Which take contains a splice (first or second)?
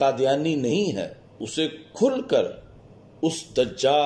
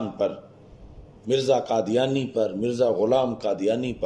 first